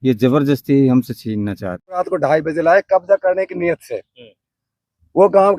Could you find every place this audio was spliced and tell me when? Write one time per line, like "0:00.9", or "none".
0:02.0